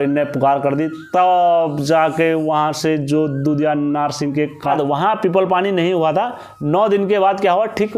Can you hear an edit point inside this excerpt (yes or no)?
yes